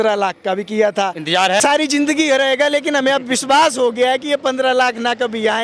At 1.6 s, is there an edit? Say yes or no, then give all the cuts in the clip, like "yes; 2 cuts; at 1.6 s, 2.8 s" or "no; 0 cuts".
yes; 1 cut; at 1.6 s